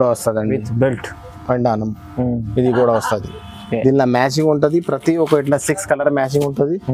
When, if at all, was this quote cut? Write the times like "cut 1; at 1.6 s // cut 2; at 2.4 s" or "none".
none